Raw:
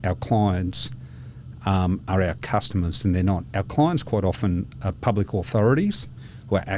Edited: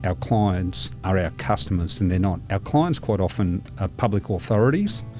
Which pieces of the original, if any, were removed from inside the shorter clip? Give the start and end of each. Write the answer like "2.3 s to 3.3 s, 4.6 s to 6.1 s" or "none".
1.0 s to 2.0 s